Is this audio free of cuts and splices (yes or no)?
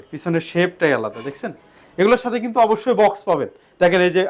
yes